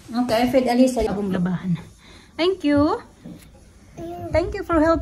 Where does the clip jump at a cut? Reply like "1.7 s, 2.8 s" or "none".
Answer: 1.1 s